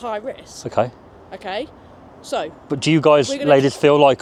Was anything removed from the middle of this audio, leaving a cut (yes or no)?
no